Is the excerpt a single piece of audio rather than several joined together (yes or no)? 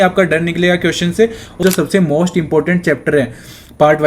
no